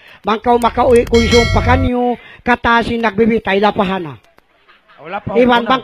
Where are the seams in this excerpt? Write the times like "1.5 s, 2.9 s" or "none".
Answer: 4.2 s